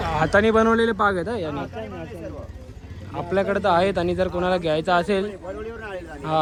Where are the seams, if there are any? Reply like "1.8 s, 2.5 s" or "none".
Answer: none